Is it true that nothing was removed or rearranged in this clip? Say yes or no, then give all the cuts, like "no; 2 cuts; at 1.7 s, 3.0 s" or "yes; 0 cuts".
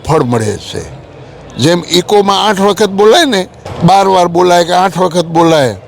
no; 1 cut; at 3.6 s